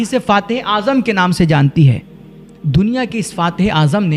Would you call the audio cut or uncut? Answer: uncut